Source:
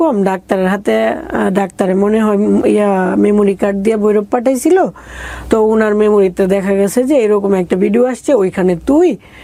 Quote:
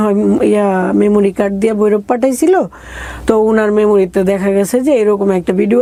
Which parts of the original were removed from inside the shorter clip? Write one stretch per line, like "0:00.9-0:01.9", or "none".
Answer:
none